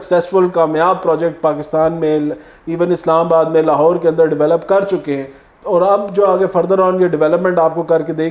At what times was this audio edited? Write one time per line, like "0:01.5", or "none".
none